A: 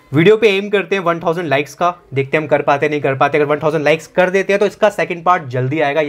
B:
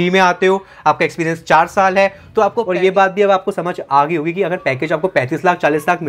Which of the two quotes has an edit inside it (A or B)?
B